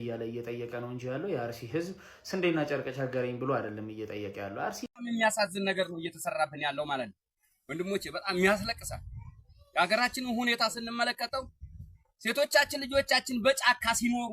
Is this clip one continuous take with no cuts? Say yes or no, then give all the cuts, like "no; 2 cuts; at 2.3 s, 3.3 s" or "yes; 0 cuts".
no; 1 cut; at 4.8 s